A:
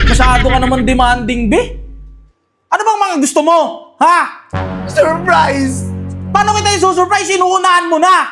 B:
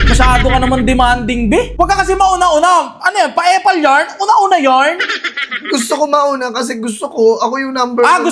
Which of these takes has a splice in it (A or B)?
B